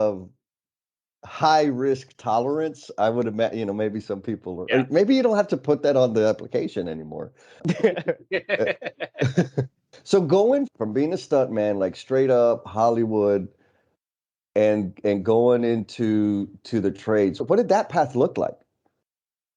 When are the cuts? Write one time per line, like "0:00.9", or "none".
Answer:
0:07.6
0:09.8
0:10.7
0:17.4